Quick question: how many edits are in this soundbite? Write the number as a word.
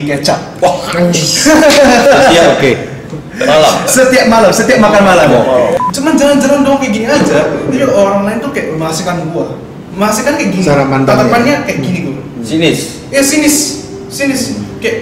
one